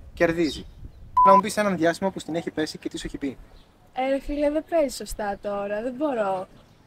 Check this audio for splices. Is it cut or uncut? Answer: cut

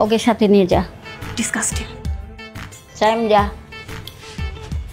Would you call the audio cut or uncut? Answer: uncut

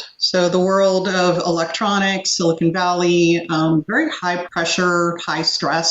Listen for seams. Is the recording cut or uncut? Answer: cut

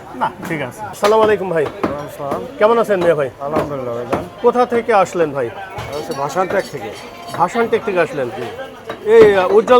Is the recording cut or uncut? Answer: uncut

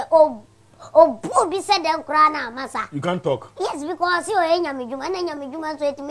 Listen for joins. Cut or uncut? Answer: uncut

